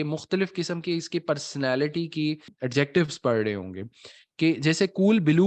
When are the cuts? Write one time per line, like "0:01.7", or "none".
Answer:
0:02.5